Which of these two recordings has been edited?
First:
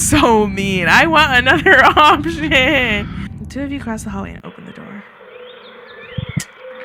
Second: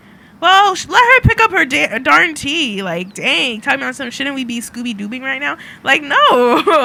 first; 1 cut; at 3.2 s

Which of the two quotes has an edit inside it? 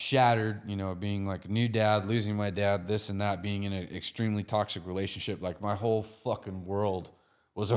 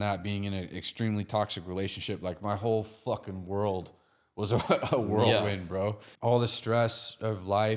second; 1 cut; at 6.1 s

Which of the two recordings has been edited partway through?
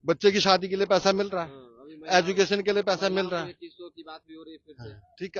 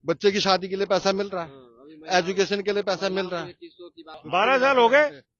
second; 1 cut; at 4.1 s

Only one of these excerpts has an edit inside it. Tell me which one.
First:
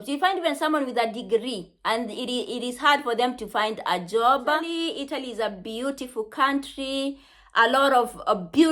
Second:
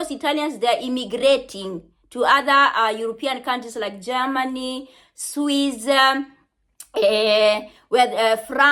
first; 1 cut; at 4.7 s

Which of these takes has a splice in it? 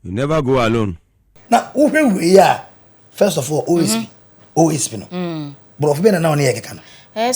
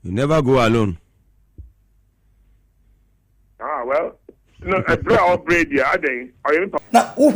first; 1 cut; at 1.4 s

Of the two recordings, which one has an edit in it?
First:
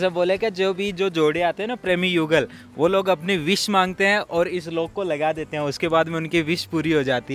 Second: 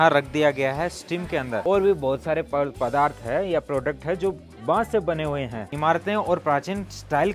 second; 2 cuts; at 1.6 s, 5.7 s

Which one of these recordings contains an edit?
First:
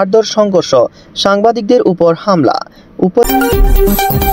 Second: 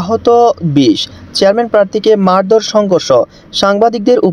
first; 1 cut; at 3.2 s

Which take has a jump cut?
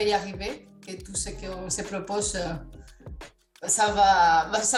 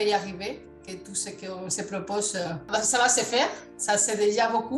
second; 2 cuts; at 2.7 s, 3.7 s

